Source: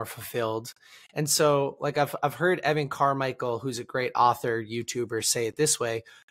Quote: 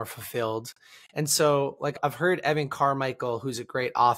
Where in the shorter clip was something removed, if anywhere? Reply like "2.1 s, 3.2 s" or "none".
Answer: 1.9 s